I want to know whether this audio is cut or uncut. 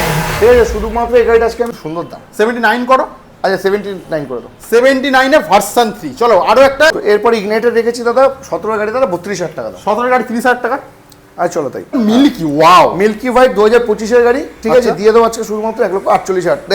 cut